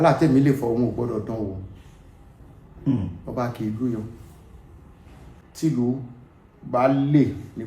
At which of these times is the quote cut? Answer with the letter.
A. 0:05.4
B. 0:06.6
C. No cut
A